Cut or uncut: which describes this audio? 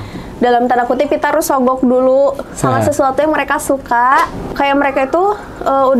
cut